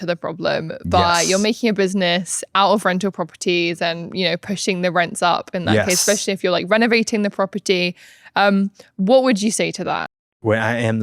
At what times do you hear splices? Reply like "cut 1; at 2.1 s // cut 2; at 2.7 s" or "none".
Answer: cut 1; at 10.1 s